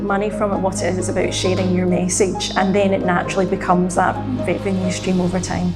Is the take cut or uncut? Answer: uncut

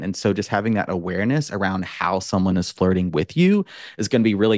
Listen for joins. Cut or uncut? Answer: uncut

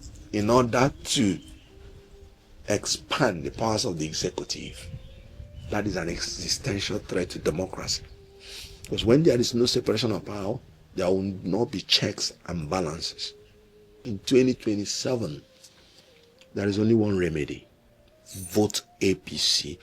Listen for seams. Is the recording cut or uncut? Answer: cut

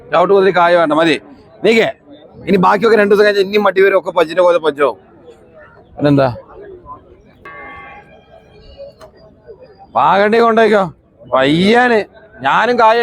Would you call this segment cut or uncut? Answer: cut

